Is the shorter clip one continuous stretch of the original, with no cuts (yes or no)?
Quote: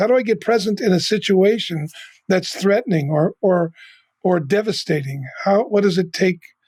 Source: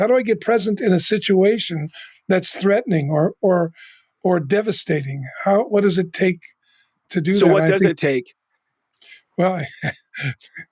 yes